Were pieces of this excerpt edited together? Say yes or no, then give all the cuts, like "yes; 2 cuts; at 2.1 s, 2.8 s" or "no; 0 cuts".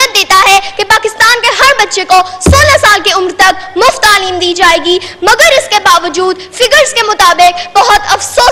no; 0 cuts